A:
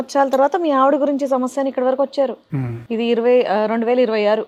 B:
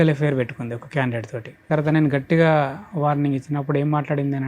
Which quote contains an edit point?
B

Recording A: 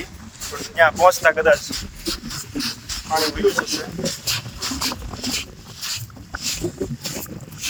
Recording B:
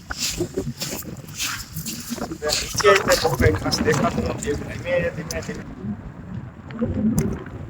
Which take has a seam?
B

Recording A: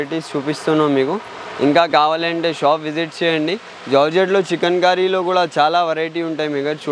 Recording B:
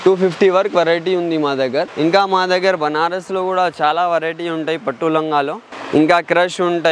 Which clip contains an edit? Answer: B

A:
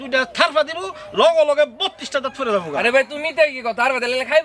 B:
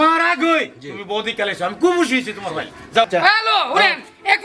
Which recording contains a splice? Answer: B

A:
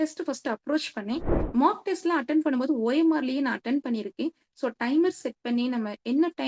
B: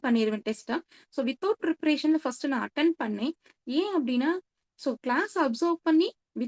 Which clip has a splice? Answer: A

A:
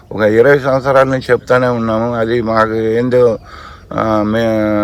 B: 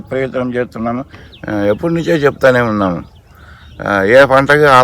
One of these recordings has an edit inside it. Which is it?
B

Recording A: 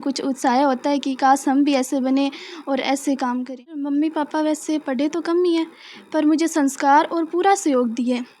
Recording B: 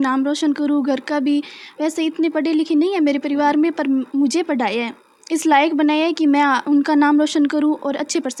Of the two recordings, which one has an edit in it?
A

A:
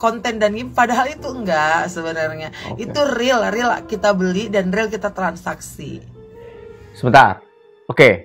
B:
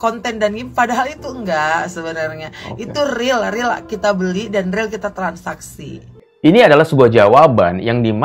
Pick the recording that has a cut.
B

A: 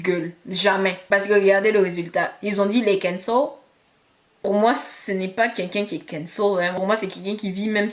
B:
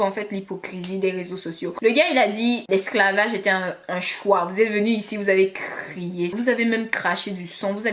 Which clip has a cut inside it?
A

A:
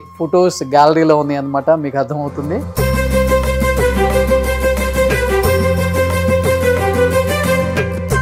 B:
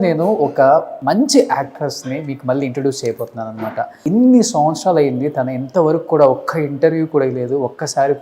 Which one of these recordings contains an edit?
B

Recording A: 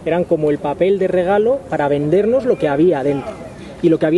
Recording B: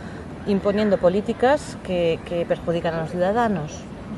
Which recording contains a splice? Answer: B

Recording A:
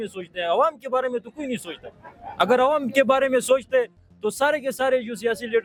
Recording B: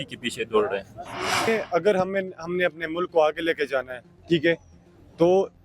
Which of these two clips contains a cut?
B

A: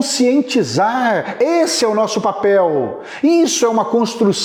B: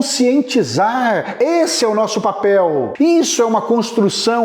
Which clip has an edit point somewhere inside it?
B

